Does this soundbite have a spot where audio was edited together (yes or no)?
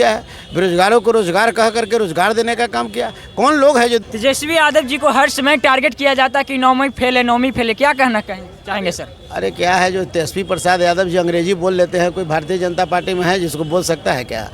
yes